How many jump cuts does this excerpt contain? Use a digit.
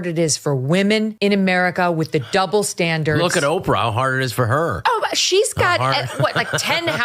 1